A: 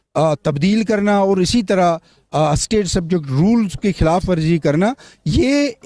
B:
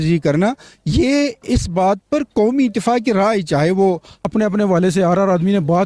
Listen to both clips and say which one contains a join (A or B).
B